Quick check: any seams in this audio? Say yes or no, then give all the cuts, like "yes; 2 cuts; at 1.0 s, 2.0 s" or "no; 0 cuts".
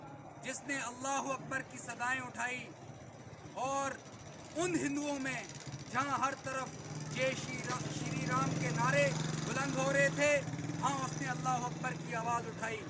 no; 0 cuts